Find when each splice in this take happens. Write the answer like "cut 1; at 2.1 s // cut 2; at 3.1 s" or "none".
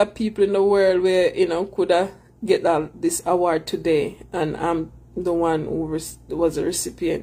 none